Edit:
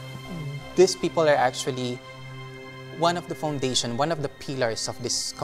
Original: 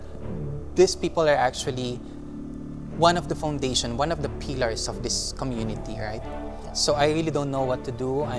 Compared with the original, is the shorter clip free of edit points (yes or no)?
yes